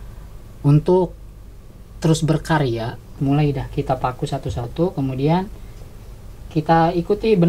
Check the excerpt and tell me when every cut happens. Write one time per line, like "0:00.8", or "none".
0:03.2